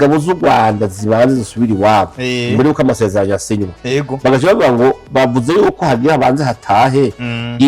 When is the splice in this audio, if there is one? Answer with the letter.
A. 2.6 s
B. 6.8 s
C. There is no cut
C